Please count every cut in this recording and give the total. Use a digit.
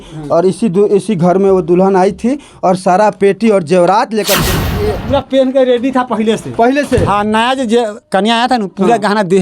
1